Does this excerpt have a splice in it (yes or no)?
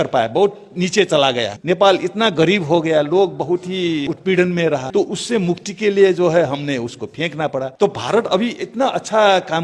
yes